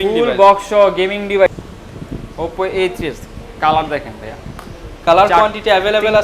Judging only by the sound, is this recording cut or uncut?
cut